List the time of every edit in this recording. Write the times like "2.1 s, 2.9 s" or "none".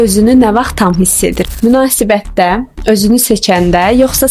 none